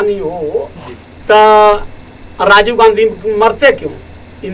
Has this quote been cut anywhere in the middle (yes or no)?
no